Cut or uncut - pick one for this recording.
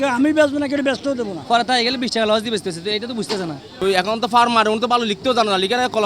cut